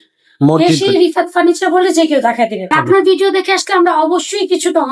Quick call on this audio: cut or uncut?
cut